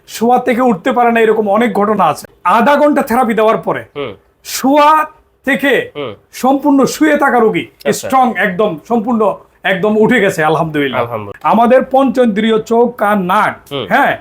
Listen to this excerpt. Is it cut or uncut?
cut